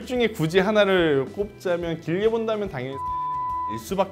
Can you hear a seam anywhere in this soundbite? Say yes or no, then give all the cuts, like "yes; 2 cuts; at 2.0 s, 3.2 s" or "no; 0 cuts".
no; 0 cuts